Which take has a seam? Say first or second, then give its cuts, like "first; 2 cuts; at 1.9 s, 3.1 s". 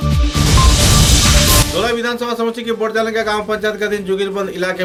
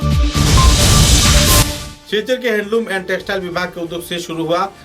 second; 1 cut; at 1.7 s